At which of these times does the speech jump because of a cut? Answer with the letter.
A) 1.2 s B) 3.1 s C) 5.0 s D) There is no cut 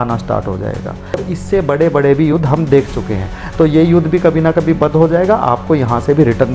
A